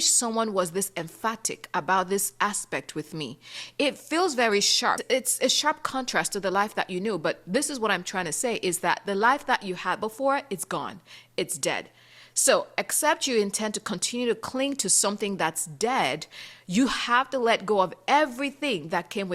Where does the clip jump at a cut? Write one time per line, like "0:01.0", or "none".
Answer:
0:05.0